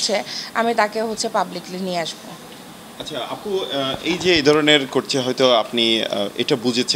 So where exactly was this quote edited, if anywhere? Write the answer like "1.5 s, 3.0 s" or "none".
none